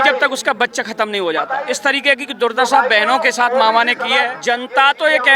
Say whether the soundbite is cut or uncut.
cut